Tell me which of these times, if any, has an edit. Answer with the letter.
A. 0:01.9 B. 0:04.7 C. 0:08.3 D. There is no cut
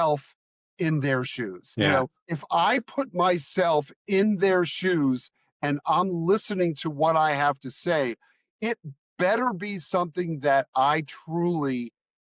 A